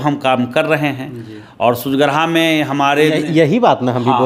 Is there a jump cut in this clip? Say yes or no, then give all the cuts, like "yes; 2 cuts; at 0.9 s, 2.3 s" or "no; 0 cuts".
no; 0 cuts